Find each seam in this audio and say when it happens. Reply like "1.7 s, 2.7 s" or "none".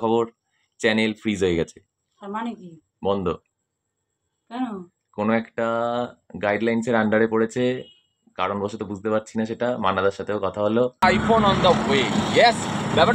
11.0 s